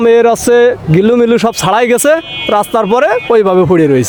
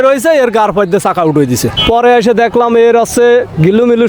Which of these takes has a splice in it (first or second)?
second